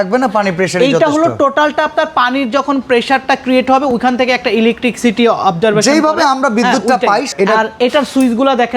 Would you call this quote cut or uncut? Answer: cut